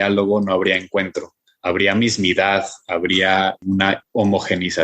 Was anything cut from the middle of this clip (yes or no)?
yes